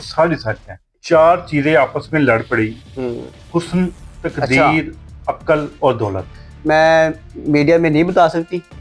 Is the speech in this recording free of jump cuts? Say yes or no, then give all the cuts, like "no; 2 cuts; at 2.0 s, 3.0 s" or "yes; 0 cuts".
no; 2 cuts; at 0.9 s, 6.3 s